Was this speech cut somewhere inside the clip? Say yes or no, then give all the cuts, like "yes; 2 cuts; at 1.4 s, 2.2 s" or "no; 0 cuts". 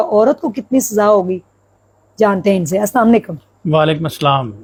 no; 0 cuts